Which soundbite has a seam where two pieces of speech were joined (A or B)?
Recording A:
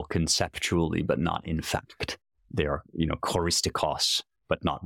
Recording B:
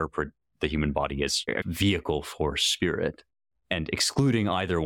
B